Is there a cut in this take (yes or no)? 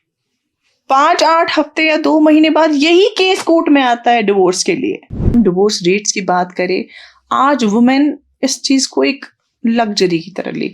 yes